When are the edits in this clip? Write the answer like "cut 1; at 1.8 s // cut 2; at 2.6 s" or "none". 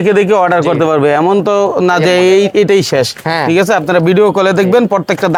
none